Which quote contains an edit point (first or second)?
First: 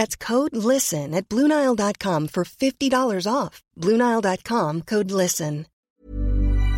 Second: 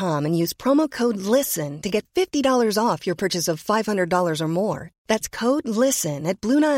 first